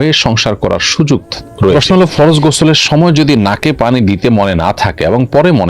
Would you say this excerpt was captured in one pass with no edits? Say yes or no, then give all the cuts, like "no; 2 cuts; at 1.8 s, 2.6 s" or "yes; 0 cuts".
no; 1 cut; at 1.8 s